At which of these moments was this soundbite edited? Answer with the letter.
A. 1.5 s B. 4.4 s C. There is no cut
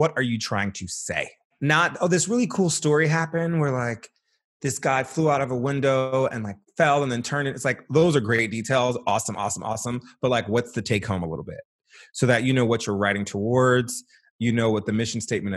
A